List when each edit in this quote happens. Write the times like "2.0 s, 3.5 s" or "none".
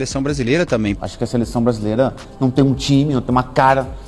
1.0 s